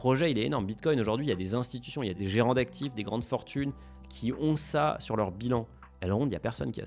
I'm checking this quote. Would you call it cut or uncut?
uncut